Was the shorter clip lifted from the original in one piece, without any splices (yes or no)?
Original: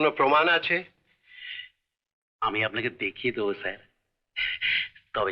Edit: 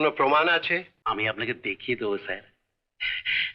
no